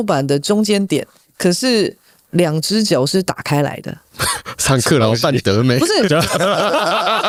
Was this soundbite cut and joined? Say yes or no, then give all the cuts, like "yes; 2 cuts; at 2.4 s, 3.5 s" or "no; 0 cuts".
no; 0 cuts